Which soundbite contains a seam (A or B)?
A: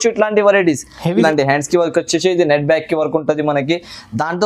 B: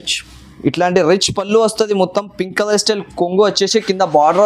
A